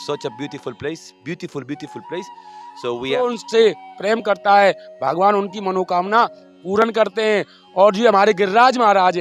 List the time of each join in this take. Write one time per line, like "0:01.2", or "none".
0:03.3